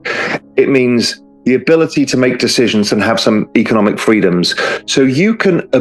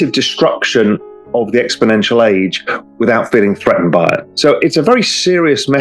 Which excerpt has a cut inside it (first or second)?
second